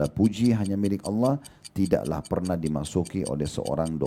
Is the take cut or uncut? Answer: uncut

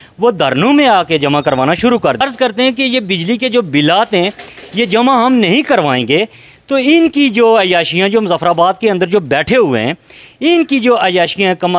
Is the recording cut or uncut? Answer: cut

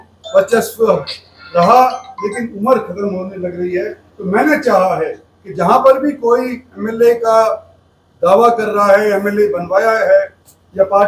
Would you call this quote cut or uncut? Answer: uncut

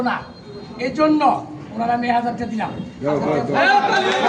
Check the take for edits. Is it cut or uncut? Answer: uncut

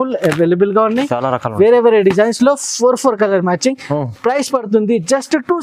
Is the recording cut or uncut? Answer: uncut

